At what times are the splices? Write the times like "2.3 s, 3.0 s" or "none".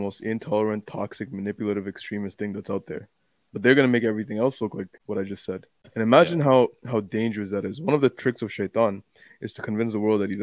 5.0 s, 5.8 s